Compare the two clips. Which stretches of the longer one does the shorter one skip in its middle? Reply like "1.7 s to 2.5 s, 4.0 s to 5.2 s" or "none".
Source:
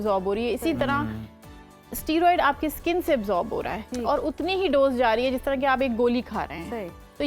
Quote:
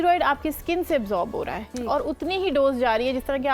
none